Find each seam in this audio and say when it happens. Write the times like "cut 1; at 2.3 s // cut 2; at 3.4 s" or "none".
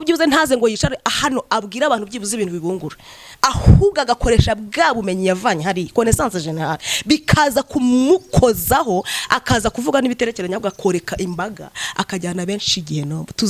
none